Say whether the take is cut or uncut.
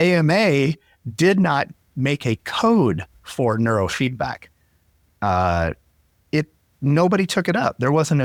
uncut